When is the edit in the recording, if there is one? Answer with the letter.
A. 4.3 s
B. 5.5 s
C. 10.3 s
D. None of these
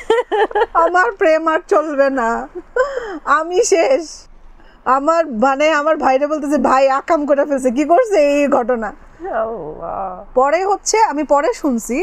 D